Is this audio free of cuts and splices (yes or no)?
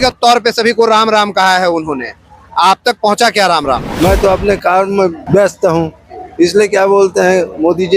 no